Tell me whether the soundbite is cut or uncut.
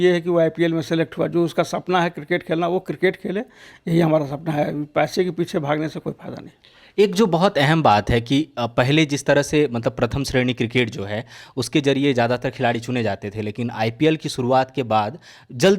uncut